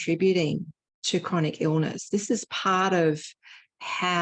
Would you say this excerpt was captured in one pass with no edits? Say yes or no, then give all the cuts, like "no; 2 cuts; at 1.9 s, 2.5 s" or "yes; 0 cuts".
yes; 0 cuts